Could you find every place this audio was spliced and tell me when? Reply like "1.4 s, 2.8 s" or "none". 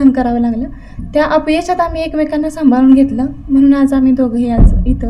none